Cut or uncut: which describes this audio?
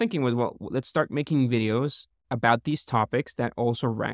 uncut